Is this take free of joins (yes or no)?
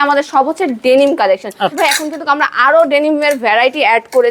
no